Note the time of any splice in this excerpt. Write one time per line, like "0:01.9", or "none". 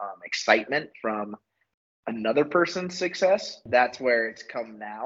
0:03.7